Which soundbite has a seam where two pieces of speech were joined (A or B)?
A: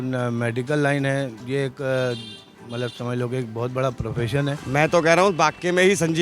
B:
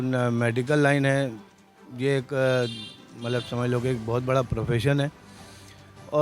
A